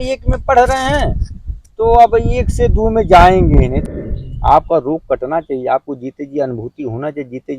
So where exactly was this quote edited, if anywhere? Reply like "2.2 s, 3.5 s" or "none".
3.8 s

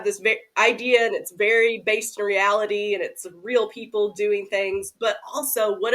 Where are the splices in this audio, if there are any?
none

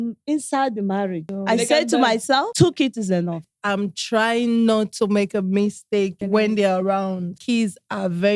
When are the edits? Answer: 1.3 s, 2.5 s, 3.5 s, 6.2 s, 7.4 s

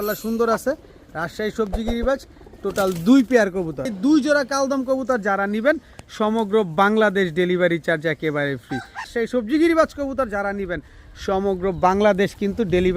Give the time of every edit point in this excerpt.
3.9 s, 9.1 s

